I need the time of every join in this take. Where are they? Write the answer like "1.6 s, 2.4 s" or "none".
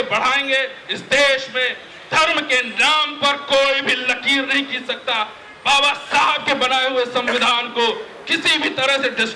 none

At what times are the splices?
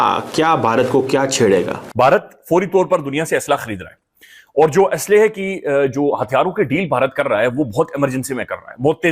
1.8 s

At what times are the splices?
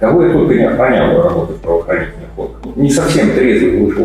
2.7 s

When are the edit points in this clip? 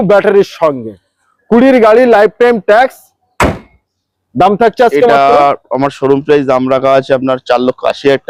none

